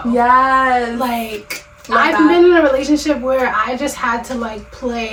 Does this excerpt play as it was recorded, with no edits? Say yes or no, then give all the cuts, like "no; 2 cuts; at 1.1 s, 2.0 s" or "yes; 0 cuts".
yes; 0 cuts